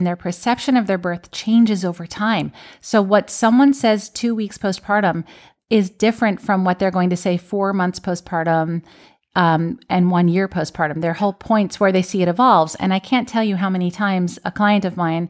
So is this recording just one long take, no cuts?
yes; 0 cuts

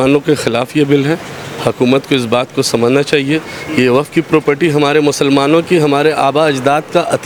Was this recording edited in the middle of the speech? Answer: no; 0 cuts

